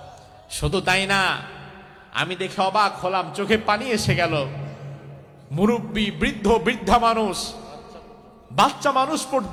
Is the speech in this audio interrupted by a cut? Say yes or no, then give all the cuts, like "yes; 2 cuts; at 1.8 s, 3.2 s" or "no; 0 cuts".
no; 0 cuts